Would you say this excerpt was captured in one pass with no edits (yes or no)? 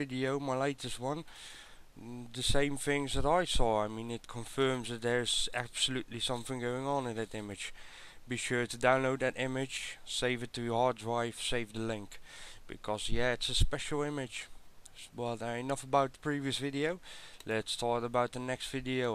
no